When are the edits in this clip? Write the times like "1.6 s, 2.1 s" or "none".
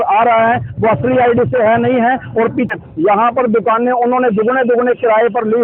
2.7 s